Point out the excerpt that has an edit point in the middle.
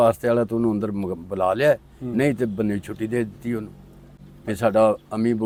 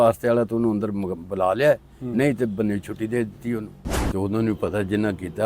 second; 1 cut; at 4.1 s

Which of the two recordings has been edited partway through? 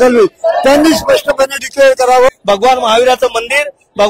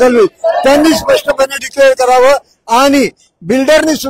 first; 1 cut; at 2.3 s

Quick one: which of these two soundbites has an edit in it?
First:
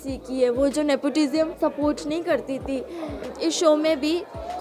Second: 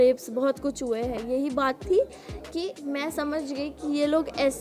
first; 2 cuts; at 1.5 s, 3.3 s

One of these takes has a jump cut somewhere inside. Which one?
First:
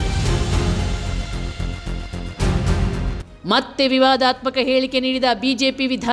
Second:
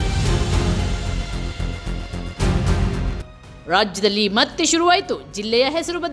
second; 1 cut; at 3.0 s

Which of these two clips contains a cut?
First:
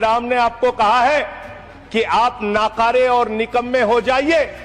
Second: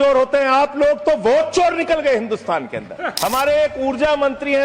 second; 1 cut; at 3.1 s

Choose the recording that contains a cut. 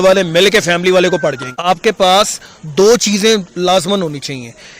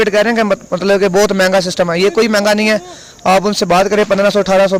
first; 1 cut; at 1.5 s

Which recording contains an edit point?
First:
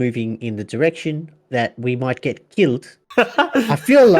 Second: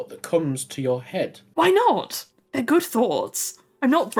first; 1 cut; at 3.0 s

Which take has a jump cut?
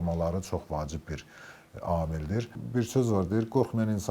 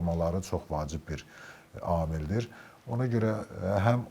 first; 1 cut; at 2.6 s

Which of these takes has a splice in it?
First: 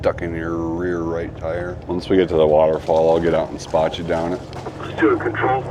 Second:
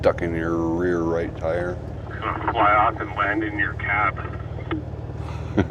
first; 1 cut; at 1.8 s

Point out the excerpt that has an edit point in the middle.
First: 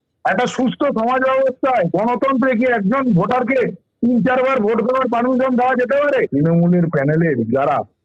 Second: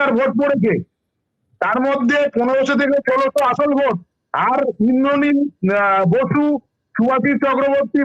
first; 1 cut; at 6.3 s

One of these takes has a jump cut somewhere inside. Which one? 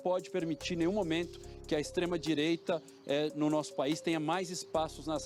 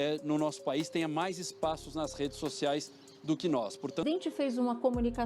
second; 1 cut; at 4.0 s

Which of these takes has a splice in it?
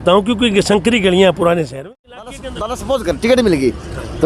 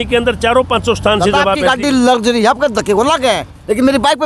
first; 1 cut; at 1.8 s

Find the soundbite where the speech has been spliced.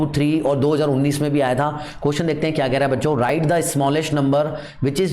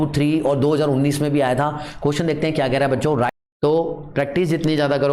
second; 1 cut; at 3.3 s

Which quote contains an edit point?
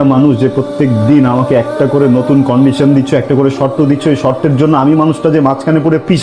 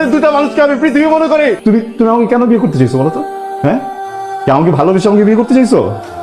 second; 1 cut; at 1.6 s

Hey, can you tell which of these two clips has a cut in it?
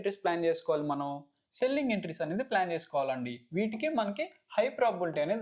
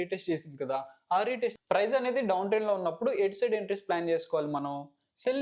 second; 1 cut; at 1.5 s

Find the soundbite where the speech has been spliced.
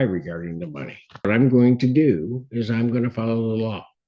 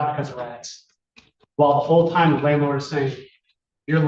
first; 1 cut; at 1.3 s

